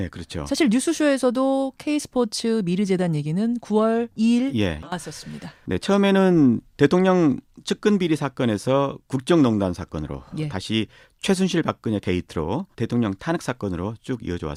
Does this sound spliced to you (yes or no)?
no